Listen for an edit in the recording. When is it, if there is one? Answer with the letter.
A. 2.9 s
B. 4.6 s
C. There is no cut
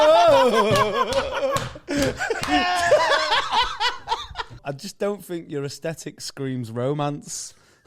B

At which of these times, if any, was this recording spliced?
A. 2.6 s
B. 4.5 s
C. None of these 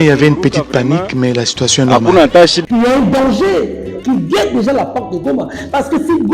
A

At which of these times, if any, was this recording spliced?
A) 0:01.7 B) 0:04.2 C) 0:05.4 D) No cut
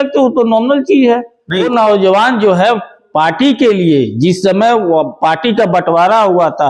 A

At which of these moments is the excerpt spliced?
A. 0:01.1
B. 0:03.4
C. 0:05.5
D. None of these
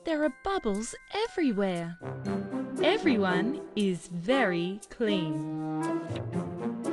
C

